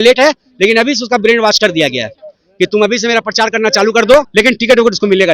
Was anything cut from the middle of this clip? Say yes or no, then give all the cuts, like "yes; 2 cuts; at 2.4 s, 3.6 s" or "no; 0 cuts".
yes; 1 cut; at 4.3 s